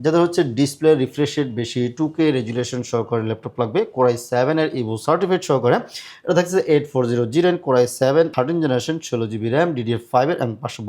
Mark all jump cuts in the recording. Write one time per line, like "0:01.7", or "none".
0:08.3